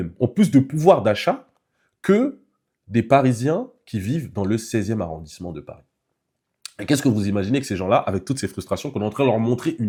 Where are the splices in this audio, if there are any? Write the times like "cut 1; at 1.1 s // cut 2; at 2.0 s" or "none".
none